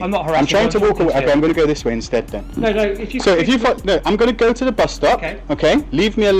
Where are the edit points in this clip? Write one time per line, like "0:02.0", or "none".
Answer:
none